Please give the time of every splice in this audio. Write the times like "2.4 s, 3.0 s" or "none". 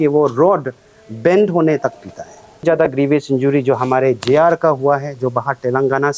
2.6 s